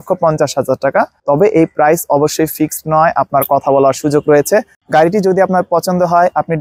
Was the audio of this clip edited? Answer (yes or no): yes